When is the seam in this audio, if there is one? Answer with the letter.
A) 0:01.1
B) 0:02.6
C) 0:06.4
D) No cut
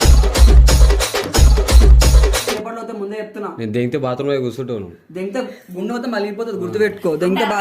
B